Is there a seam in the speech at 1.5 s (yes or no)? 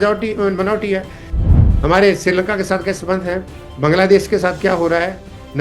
yes